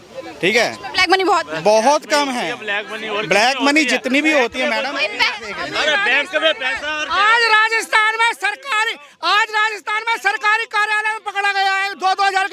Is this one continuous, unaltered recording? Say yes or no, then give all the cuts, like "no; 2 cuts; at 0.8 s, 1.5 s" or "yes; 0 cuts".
yes; 0 cuts